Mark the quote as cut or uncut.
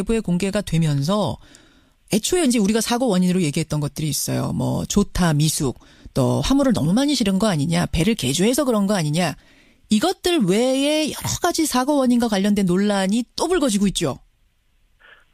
uncut